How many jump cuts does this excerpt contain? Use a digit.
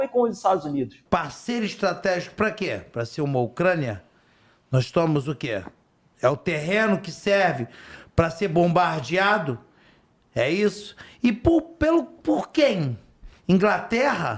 1